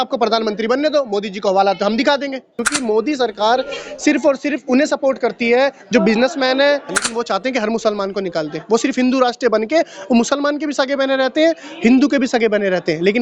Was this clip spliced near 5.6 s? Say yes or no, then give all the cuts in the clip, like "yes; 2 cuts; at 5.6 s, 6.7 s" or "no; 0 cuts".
no; 2 cuts; at 2.7 s, 7.0 s